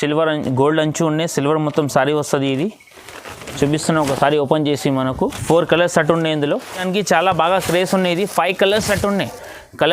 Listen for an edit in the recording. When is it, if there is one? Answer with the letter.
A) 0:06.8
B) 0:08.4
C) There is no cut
A